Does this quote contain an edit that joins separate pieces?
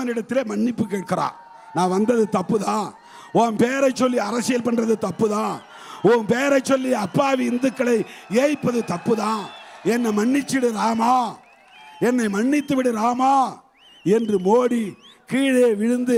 no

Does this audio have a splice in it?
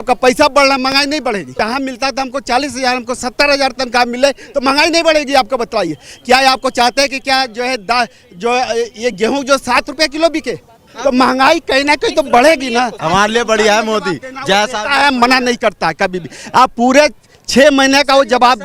yes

